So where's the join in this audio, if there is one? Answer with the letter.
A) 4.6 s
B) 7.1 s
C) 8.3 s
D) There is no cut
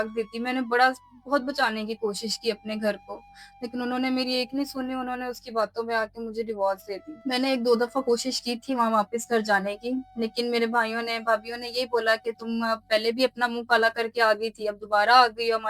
B